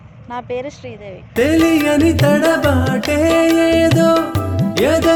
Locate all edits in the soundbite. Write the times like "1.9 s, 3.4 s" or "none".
none